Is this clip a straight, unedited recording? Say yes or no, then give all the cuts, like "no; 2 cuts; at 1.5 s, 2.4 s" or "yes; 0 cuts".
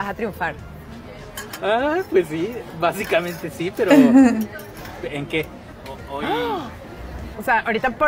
yes; 0 cuts